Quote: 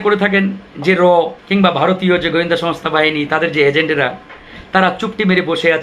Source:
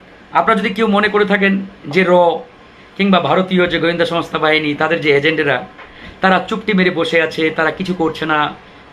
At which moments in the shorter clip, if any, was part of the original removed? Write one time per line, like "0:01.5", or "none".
0:01.4

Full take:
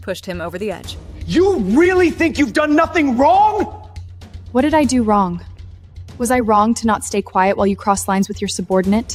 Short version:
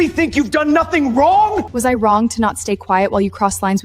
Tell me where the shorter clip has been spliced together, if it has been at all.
0:01.7

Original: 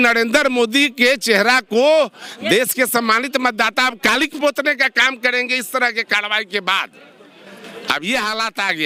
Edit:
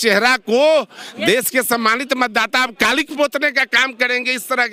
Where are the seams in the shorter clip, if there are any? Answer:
none

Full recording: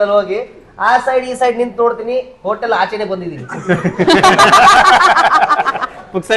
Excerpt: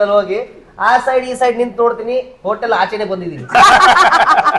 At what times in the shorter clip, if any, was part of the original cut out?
0:03.5

